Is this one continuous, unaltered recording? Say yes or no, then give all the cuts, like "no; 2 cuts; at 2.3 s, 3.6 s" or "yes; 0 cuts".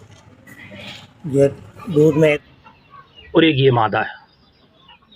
no; 1 cut; at 2.4 s